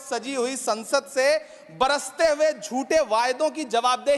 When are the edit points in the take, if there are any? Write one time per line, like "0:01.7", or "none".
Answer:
none